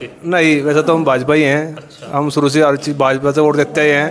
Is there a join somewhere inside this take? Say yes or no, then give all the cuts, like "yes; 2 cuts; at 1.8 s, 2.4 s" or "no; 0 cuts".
no; 0 cuts